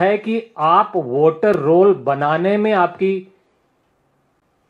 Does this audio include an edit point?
no; 0 cuts

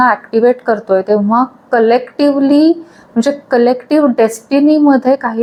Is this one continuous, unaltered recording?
yes; 0 cuts

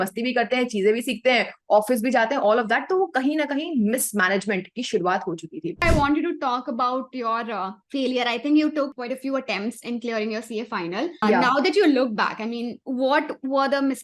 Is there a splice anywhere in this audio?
yes; 5 cuts; at 5.8 s, 7.8 s, 9.0 s, 11.2 s, 12.8 s

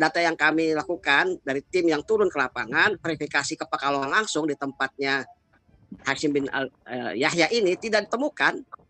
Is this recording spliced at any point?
no; 0 cuts

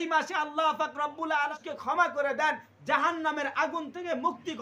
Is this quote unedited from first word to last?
no; 1 cut; at 1.6 s

